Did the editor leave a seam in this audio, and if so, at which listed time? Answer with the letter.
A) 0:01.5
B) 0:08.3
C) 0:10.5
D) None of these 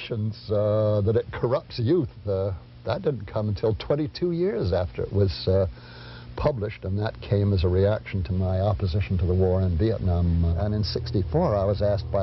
C